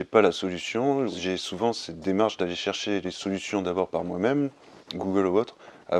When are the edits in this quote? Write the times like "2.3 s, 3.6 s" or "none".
1.1 s